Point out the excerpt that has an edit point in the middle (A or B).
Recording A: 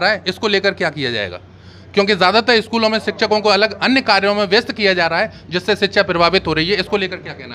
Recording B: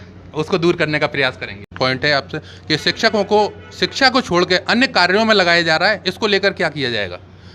B